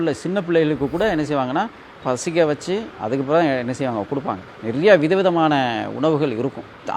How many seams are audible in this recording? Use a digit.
1